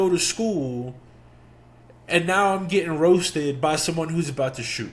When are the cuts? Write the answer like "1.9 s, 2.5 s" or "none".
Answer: none